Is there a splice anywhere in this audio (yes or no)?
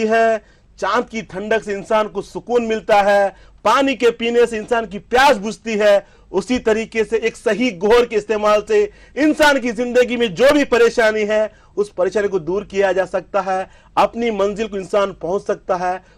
no